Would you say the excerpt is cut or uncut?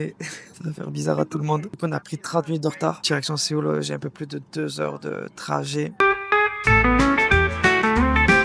uncut